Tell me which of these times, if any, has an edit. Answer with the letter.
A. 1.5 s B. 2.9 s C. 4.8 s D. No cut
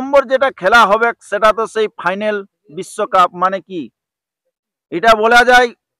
D